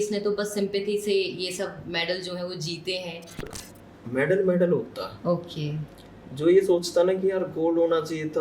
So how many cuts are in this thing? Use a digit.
1